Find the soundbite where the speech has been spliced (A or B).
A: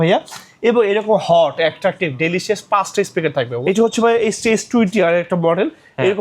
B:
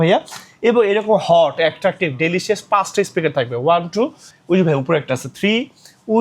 A